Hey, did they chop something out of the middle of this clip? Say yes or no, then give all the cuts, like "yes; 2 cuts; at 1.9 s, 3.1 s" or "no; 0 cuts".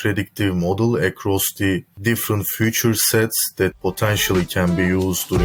no; 0 cuts